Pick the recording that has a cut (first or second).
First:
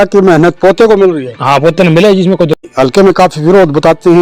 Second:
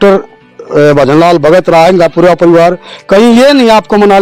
first